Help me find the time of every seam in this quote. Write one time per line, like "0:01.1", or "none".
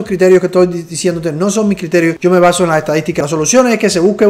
0:02.2
0:03.2